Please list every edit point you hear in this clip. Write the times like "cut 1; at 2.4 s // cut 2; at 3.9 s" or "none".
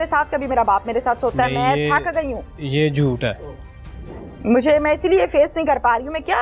none